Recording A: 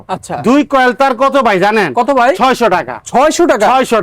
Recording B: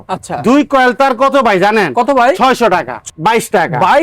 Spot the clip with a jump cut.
B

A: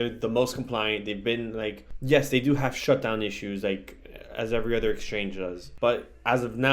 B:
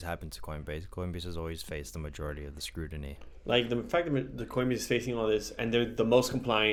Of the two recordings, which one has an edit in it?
A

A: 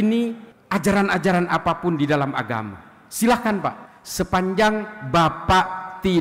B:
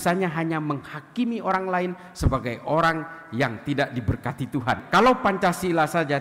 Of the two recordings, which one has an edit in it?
B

